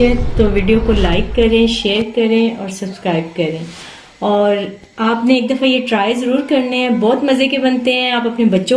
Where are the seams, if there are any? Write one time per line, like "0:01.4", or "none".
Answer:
none